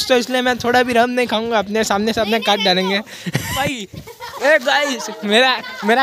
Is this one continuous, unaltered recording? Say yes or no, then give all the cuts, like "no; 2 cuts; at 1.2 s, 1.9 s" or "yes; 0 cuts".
no; 1 cut; at 3.6 s